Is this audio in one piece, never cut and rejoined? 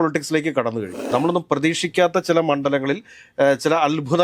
no; 1 cut; at 1.0 s

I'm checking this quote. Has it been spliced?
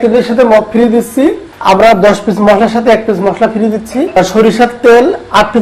yes; 2 cuts; at 1.5 s, 4.2 s

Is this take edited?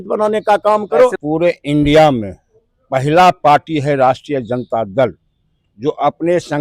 yes; 1 cut; at 1.1 s

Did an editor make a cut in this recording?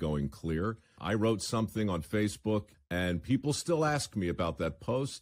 yes; 2 cuts; at 1.0 s, 2.8 s

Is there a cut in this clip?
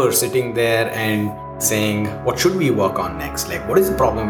yes; 1 cut; at 1.6 s

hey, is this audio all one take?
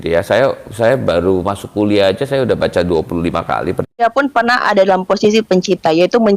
no; 1 cut; at 4.0 s

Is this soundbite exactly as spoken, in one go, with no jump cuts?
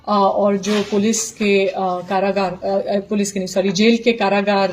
yes; 0 cuts

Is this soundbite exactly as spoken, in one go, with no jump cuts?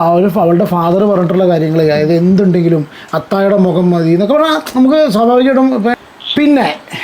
no; 1 cut; at 6.0 s

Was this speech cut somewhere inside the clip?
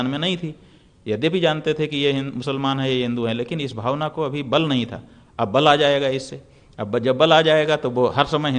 no; 0 cuts

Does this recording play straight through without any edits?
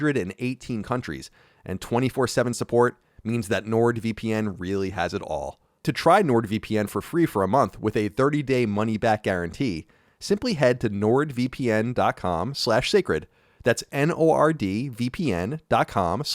no; 1 cut; at 5.8 s

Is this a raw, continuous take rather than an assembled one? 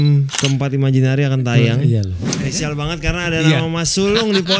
no; 1 cut; at 2.1 s

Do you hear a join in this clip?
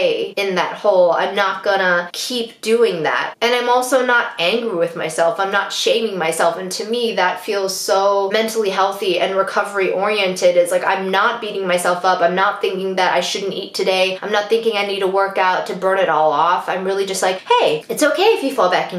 no; 0 cuts

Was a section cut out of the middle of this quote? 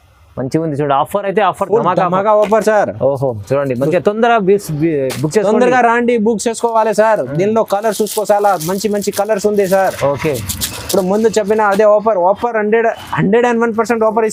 no; 0 cuts

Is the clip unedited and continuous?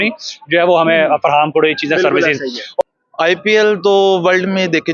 no; 1 cut; at 2.8 s

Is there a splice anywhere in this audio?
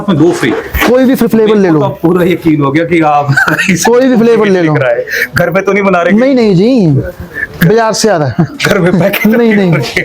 no; 0 cuts

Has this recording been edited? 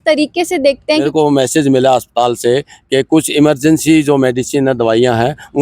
yes; 1 cut; at 1.0 s

